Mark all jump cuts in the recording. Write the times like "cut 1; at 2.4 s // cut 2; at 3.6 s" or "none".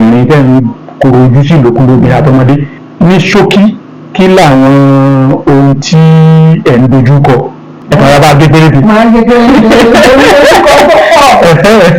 cut 1; at 2.8 s // cut 2; at 7.8 s